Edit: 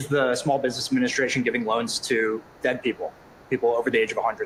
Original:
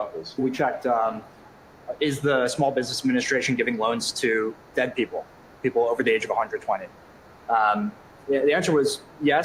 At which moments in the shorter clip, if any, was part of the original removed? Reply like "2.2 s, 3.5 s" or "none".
none